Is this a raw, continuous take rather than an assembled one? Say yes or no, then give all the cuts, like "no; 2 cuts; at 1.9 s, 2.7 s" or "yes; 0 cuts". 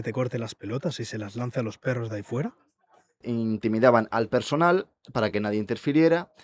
no; 1 cut; at 3.2 s